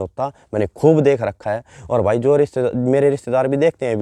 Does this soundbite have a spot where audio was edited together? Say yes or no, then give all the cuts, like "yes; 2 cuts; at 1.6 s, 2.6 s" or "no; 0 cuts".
no; 0 cuts